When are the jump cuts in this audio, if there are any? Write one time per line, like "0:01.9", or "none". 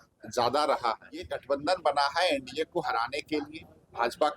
0:01.4